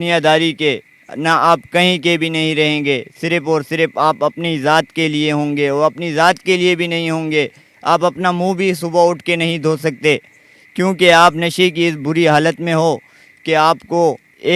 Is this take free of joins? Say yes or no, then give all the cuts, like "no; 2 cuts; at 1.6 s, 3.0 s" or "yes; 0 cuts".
yes; 0 cuts